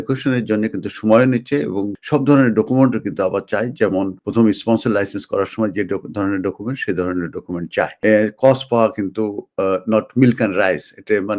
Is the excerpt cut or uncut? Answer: cut